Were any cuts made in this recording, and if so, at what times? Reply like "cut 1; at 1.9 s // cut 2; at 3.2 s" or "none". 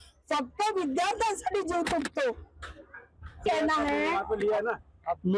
cut 1; at 3.4 s